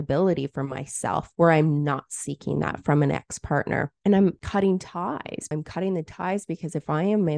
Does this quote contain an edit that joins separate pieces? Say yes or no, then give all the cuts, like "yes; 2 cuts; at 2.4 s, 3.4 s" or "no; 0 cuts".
yes; 2 cuts; at 1.3 s, 5.5 s